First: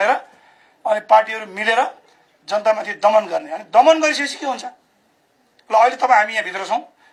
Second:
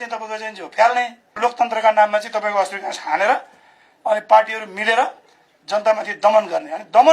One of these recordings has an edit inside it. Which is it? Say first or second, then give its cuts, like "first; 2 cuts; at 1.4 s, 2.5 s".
second; 1 cut; at 1.4 s